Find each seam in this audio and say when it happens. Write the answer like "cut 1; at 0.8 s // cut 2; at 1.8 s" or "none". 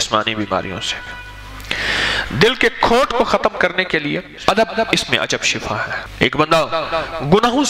cut 1; at 4.4 s // cut 2; at 6.0 s